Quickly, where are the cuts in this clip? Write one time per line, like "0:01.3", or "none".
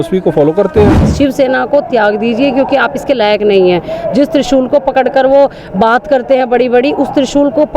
0:01.0